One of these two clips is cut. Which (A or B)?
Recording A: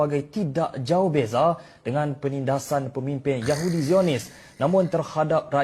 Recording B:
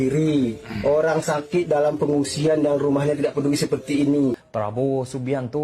B